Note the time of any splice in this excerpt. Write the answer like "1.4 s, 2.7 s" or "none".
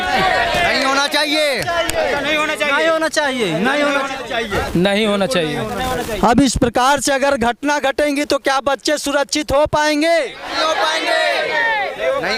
none